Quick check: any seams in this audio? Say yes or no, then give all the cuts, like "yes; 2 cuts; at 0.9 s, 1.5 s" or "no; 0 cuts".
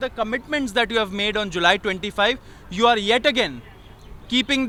no; 0 cuts